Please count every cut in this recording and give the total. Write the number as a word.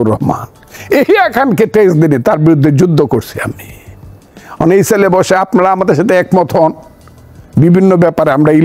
zero